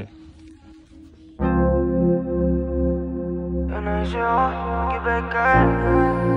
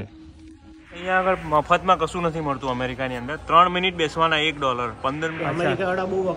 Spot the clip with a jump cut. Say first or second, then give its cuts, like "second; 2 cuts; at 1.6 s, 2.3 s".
second; 2 cuts; at 1.0 s, 5.3 s